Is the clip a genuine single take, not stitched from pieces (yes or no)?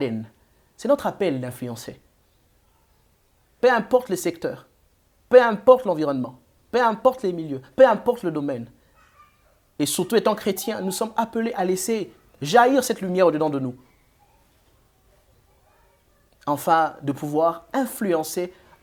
yes